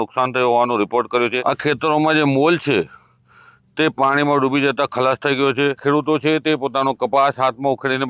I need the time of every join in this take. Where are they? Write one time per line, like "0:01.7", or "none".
0:01.4
0:05.8